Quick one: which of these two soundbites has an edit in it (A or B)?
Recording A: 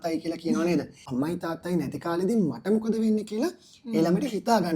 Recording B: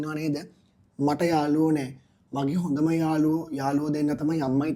A